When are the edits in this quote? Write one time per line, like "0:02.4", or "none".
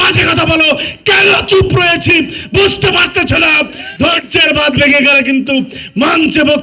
0:03.8